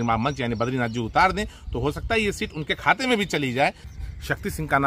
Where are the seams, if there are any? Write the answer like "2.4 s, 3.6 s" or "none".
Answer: 3.9 s